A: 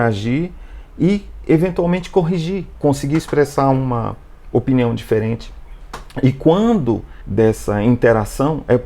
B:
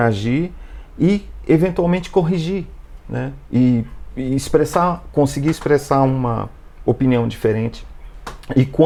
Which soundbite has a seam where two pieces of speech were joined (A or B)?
A